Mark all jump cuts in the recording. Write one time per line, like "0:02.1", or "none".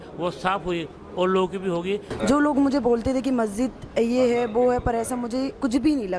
0:02.1